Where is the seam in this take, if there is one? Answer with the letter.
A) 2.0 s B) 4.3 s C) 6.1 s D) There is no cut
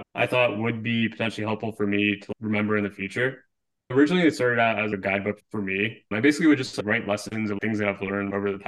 C